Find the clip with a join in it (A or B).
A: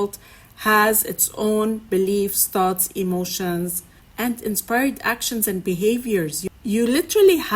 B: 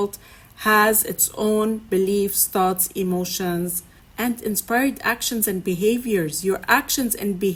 A